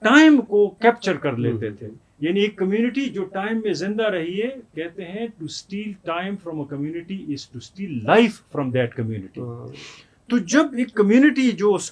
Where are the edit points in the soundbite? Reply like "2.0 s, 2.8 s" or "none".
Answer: none